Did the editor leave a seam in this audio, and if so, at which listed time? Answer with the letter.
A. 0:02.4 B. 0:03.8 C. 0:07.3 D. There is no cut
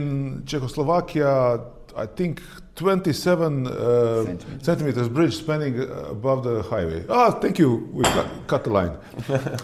D